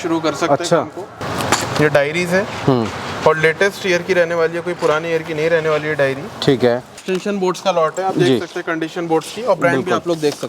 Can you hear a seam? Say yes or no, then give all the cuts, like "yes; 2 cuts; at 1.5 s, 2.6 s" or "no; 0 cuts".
yes; 2 cuts; at 1.2 s, 6.9 s